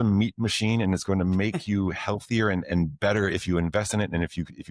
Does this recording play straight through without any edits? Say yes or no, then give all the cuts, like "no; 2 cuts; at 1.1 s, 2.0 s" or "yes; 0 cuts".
yes; 0 cuts